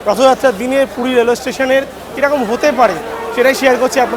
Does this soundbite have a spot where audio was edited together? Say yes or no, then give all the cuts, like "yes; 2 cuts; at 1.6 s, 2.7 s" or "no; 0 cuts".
no; 0 cuts